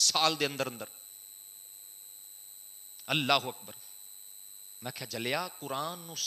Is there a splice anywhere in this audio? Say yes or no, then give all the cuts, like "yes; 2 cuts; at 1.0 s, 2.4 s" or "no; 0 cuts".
no; 0 cuts